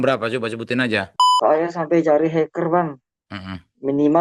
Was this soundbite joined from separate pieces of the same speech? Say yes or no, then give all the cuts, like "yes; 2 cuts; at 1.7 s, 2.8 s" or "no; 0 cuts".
yes; 1 cut; at 1.4 s